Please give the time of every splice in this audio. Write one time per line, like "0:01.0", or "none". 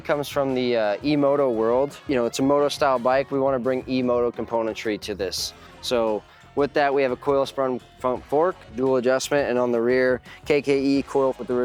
none